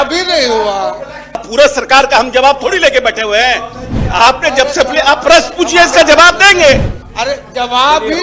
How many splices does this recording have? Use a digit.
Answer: 2